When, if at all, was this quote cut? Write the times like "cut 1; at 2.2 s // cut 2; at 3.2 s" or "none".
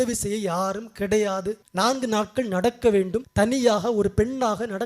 cut 1; at 1.6 s // cut 2; at 3.2 s